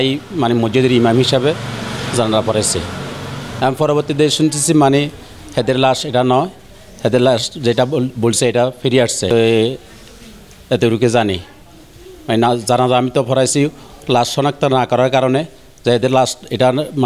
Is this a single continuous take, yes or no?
yes